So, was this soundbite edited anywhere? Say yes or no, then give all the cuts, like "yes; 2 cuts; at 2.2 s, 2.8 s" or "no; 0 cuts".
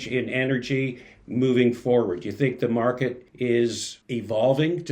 yes; 2 cuts; at 3.2 s, 3.9 s